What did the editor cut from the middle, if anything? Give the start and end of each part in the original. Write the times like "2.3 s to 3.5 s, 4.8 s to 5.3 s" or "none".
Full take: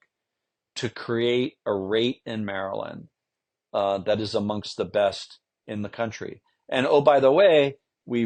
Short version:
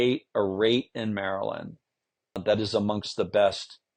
3.7 s to 4.0 s